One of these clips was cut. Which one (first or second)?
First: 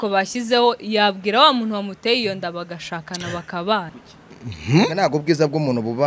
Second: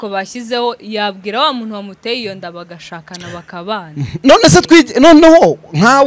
first